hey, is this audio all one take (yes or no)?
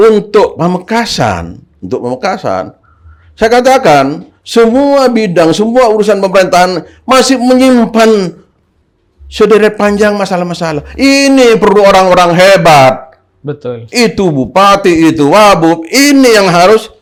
yes